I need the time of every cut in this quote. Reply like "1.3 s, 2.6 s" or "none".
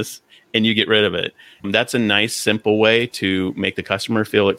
1.6 s